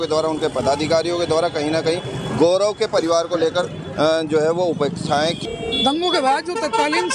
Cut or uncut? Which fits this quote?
cut